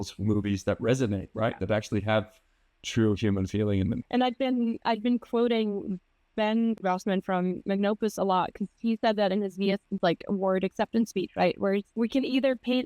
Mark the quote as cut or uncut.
cut